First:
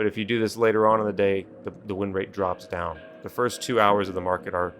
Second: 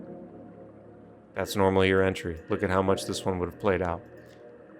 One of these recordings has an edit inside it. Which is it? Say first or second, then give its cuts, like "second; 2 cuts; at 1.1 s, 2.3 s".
second; 1 cut; at 1.3 s